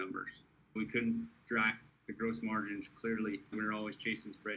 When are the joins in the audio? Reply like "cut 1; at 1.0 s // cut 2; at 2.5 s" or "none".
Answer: cut 1; at 0.8 s // cut 2; at 1.9 s // cut 3; at 3.5 s